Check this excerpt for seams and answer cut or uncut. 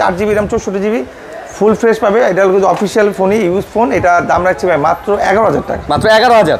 uncut